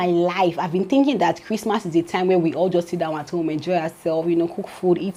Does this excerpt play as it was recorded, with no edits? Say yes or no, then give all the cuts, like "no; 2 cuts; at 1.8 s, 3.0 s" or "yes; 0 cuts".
yes; 0 cuts